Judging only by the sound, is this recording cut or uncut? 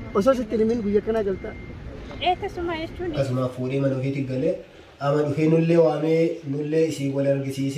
cut